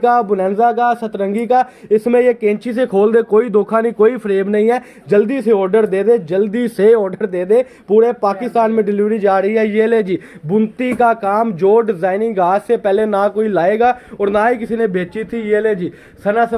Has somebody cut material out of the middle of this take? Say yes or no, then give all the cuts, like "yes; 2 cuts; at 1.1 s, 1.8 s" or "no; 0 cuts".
no; 0 cuts